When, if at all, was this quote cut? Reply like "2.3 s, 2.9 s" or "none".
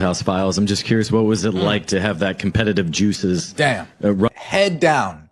none